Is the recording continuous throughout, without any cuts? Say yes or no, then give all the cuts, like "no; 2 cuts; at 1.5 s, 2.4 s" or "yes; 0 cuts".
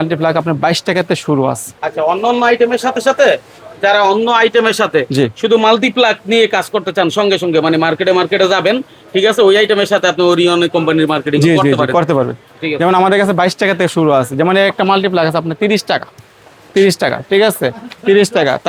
yes; 0 cuts